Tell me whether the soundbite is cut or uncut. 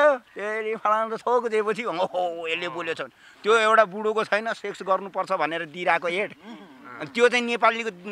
uncut